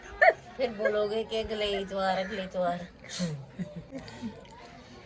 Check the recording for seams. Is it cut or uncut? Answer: uncut